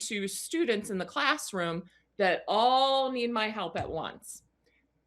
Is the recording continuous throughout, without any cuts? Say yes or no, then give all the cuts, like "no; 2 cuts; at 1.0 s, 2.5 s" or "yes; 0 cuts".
yes; 0 cuts